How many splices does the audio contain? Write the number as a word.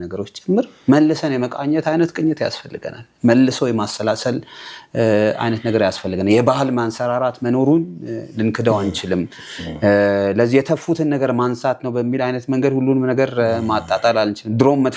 zero